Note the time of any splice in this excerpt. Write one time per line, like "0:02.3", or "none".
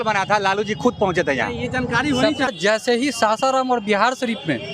0:02.5